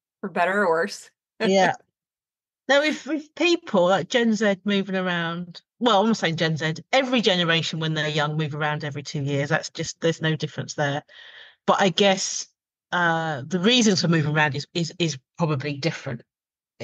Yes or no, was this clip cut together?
no